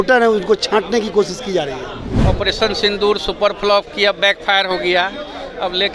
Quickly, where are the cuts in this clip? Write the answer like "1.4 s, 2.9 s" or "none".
2.1 s